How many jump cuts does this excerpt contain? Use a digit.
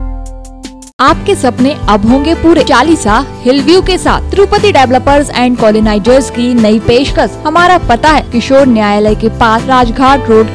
5